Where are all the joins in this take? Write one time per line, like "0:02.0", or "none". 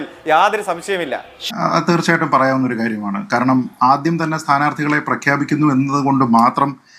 0:01.4